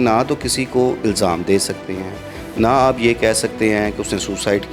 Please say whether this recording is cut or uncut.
uncut